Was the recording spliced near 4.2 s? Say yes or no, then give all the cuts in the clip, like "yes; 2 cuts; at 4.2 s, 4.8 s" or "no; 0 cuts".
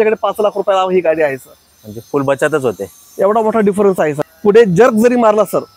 yes; 1 cut; at 4.2 s